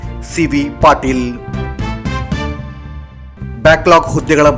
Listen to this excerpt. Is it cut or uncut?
uncut